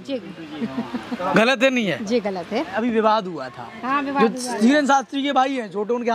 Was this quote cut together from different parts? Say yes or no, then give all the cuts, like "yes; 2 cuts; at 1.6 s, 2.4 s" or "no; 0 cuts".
yes; 1 cut; at 2.7 s